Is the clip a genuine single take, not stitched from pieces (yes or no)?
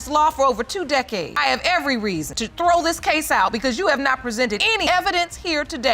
no